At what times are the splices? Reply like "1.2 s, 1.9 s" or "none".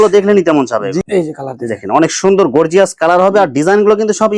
1.0 s